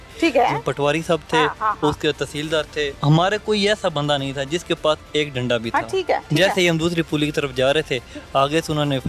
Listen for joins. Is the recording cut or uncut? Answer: cut